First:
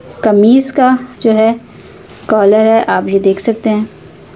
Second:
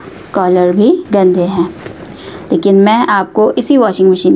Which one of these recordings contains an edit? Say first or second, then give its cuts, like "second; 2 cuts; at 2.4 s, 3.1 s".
second; 1 cut; at 1.0 s